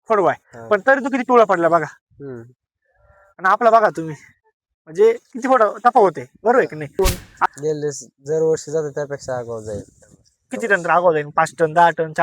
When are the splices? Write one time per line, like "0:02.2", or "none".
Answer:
0:07.0